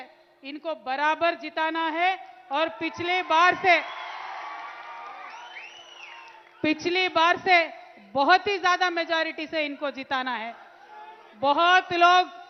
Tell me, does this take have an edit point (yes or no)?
no